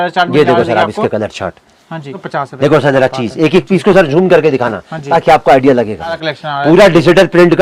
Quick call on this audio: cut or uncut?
cut